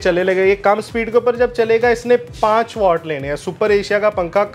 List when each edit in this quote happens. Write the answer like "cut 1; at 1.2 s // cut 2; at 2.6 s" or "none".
none